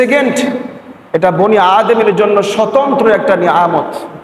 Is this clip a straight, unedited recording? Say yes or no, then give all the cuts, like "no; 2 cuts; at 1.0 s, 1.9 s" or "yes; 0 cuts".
yes; 0 cuts